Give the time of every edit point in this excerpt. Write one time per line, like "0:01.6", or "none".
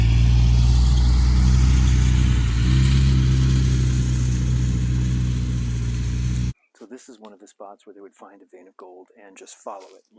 0:06.5